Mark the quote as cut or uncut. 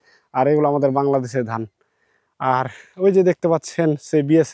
uncut